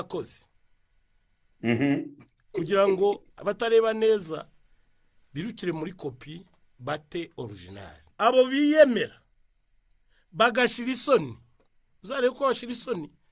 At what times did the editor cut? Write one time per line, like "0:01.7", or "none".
0:03.3
0:08.0